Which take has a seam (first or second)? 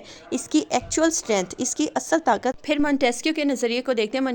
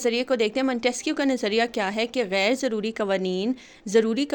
first